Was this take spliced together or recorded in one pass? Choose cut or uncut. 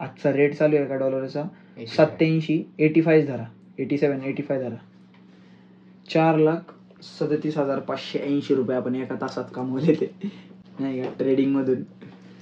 uncut